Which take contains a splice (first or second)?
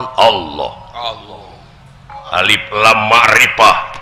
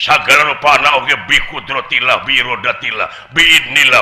first